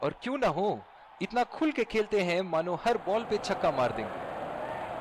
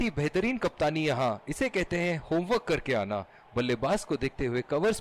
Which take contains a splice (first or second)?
first